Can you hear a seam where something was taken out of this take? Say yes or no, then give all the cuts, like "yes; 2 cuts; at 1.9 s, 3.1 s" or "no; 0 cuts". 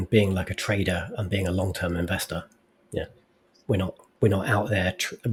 no; 0 cuts